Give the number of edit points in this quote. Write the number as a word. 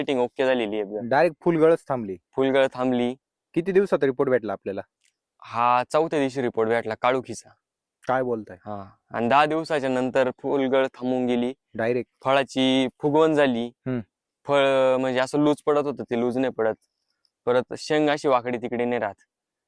zero